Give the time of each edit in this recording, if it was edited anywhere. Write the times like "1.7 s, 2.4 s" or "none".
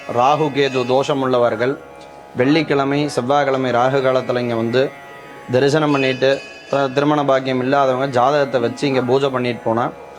none